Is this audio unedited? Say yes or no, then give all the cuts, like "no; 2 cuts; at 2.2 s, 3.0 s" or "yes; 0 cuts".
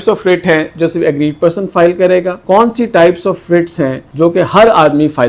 no; 2 cuts; at 2.4 s, 4.0 s